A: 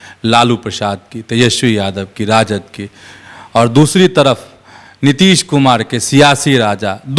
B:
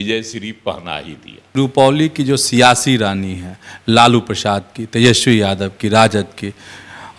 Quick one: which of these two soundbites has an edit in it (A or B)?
B